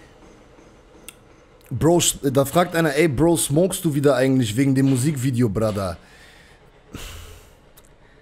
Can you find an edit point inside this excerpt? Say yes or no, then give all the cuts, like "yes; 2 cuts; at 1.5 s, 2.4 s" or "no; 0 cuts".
no; 0 cuts